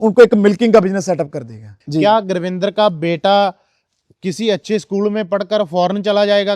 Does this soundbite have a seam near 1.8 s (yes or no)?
yes